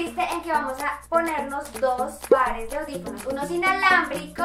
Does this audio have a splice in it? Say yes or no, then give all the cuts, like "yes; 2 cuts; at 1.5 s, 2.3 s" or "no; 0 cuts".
no; 0 cuts